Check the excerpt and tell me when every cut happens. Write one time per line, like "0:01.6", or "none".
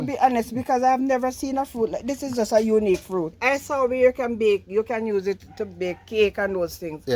0:03.4